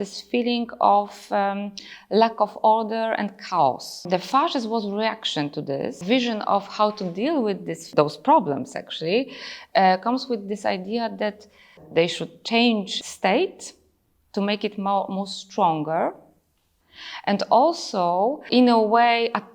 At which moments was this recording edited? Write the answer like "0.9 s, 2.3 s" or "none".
4.0 s, 6.0 s, 7.8 s, 11.8 s, 12.9 s, 18.4 s